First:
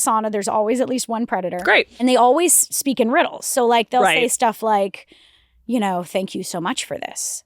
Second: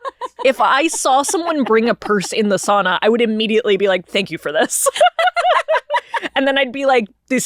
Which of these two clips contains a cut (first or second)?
first